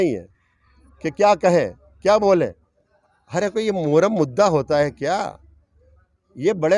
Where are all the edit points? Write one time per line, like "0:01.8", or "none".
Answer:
none